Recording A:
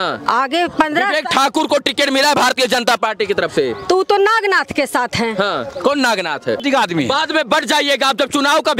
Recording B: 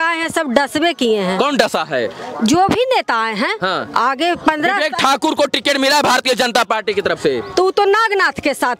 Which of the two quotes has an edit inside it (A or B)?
A